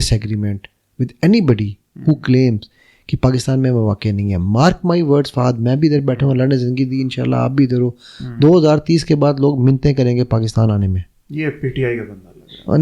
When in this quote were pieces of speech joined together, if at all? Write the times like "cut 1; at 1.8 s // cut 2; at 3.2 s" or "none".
none